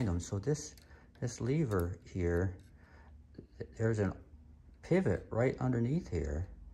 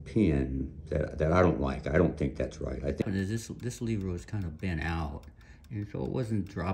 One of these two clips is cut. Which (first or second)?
second